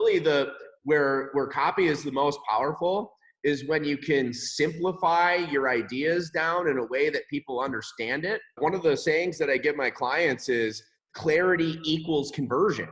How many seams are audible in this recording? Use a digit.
1